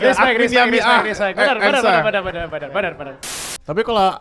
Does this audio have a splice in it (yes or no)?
yes